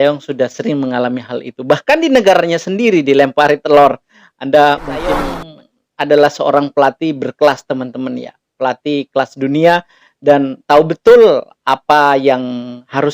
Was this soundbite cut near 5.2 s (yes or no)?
yes